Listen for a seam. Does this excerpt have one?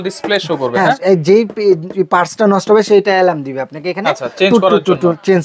no; 0 cuts

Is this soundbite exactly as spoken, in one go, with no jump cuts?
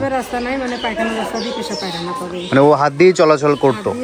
yes; 0 cuts

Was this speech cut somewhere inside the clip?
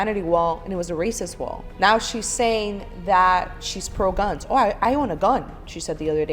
yes; 1 cut; at 1.6 s

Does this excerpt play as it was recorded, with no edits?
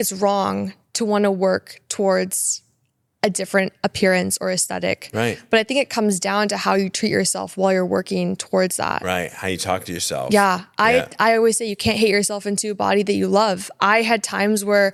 yes; 0 cuts

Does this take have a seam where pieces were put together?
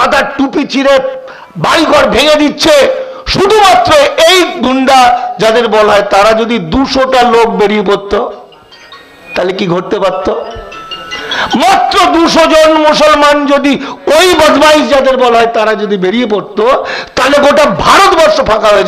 no; 0 cuts

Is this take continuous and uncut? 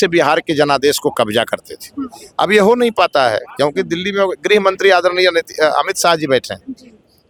yes; 0 cuts

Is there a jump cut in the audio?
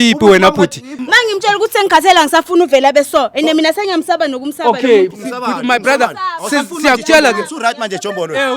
no; 0 cuts

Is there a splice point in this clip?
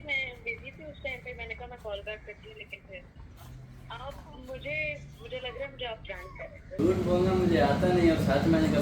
yes; 2 cuts; at 3.2 s, 6.7 s

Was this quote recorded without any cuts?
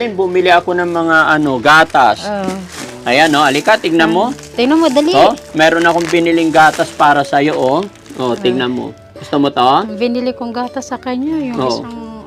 yes; 0 cuts

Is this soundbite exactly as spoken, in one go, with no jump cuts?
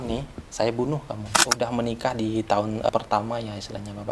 no; 1 cut; at 1.5 s

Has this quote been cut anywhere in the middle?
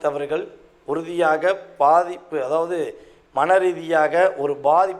no; 0 cuts

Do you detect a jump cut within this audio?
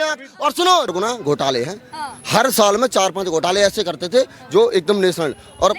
yes; 1 cut; at 0.9 s

